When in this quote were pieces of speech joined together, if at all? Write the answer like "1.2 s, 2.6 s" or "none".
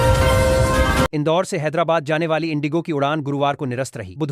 1.1 s